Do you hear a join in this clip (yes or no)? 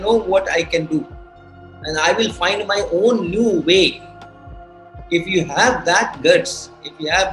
no